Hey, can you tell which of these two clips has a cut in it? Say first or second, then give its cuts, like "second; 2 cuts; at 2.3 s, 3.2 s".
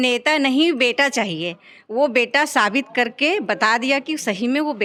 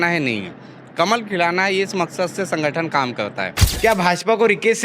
second; 1 cut; at 3.6 s